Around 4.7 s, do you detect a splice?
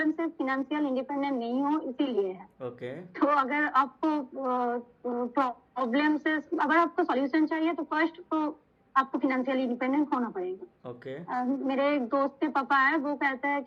no; 0 cuts

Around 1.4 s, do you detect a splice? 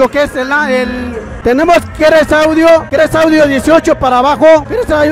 yes; 1 cut; at 1.4 s

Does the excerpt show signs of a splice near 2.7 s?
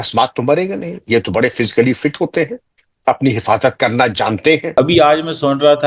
no; 1 cut; at 4.7 s

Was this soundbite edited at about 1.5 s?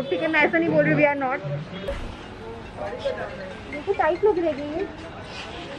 no; 0 cuts

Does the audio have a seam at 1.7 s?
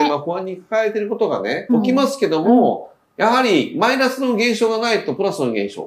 yes; 1 cut; at 1.7 s

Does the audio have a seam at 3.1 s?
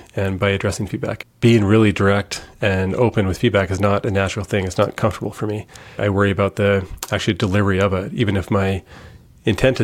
no; 1 cut; at 1.1 s

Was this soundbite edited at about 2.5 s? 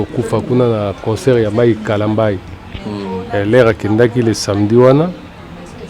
no; 0 cuts

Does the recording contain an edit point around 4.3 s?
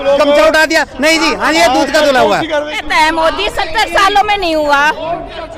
no; 1 cut; at 2.8 s

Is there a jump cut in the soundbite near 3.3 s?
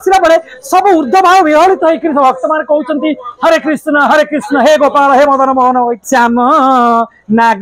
no; 1 cut; at 6.0 s

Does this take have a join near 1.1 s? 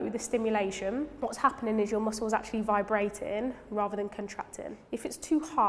yes; 2 cuts; at 1.1 s, 4.8 s

